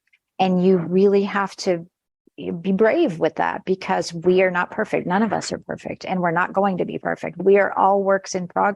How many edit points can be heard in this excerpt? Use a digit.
1